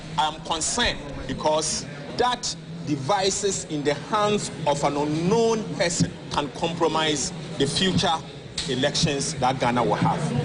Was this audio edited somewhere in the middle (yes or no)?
yes